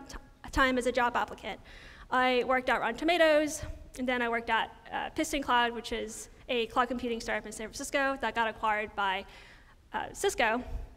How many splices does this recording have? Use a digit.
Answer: 1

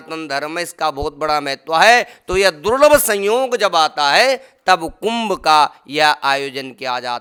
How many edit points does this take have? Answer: 0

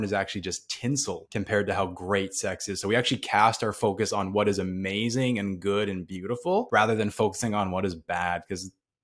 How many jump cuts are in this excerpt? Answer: 2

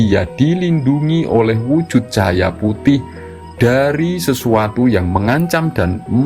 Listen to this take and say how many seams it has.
0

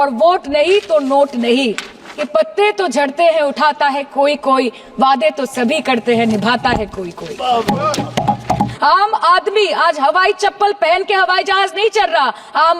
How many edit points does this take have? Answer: 2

